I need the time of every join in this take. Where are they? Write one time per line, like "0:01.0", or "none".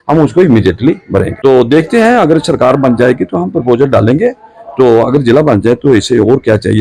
0:01.3